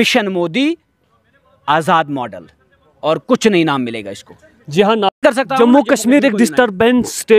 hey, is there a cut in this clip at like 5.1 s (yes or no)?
yes